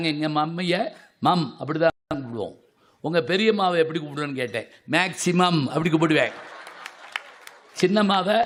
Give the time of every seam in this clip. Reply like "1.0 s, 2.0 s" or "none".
none